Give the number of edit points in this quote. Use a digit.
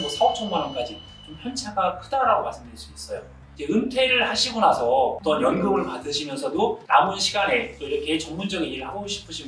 3